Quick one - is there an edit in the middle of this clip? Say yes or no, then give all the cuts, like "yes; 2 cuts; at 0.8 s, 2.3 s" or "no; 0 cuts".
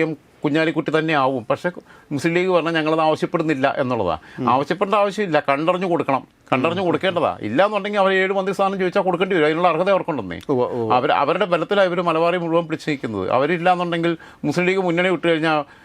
no; 0 cuts